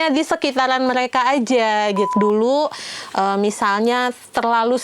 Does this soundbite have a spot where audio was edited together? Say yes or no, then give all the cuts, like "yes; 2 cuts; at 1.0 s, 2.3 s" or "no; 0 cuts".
yes; 1 cut; at 2.1 s